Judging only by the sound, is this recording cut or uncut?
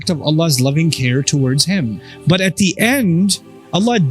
cut